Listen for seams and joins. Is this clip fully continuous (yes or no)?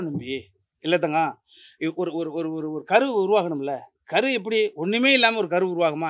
yes